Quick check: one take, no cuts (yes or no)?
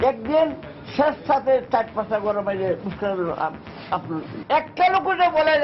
yes